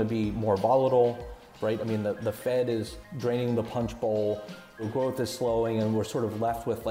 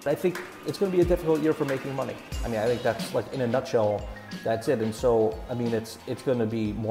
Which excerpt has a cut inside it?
first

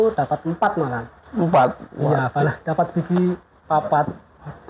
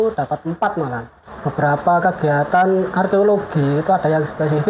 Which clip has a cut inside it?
second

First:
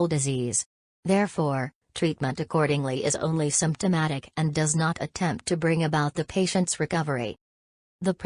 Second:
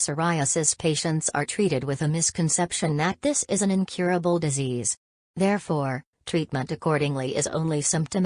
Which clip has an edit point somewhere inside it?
first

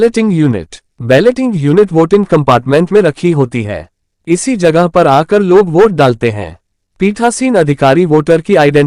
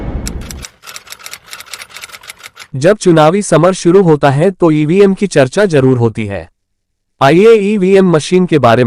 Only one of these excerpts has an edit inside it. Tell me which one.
second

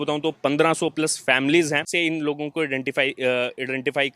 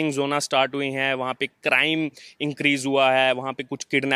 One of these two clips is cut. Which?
first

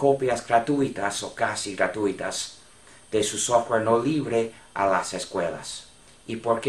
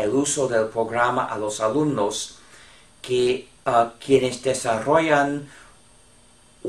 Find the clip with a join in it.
second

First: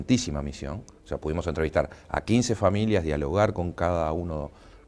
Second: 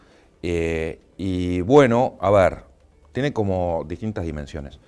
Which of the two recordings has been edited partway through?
second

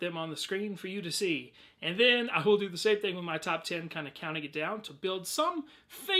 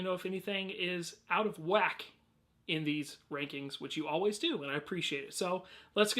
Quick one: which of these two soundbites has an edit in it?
second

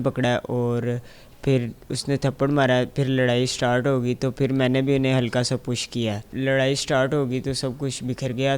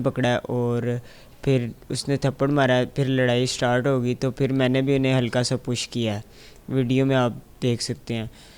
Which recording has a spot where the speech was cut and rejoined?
first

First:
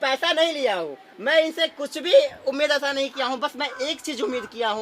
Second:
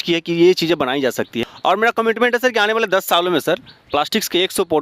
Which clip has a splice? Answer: second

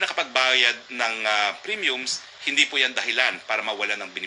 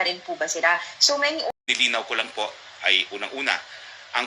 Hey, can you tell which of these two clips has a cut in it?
second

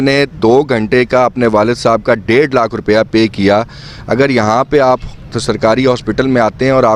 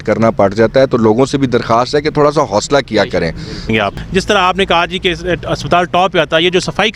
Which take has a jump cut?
second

